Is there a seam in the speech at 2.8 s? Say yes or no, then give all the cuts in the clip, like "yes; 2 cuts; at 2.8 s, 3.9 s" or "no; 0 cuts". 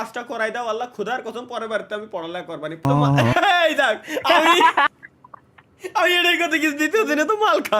yes; 1 cut; at 2.8 s